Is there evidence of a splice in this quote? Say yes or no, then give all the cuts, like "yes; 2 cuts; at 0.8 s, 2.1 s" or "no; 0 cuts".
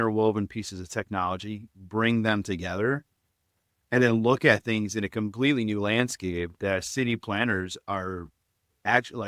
no; 0 cuts